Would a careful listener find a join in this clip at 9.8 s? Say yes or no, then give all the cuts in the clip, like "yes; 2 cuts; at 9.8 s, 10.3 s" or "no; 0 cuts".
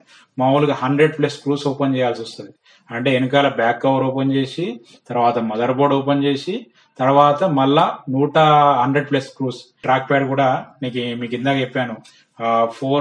yes; 1 cut; at 9.8 s